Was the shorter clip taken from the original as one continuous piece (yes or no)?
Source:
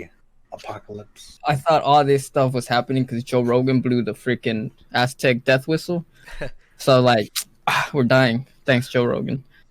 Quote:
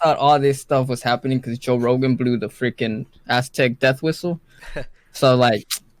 yes